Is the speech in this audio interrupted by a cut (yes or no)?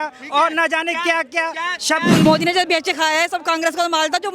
yes